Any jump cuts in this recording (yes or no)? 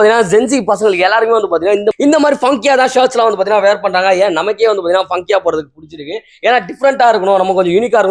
no